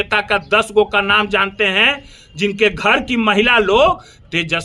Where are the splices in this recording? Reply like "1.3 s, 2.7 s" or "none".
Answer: none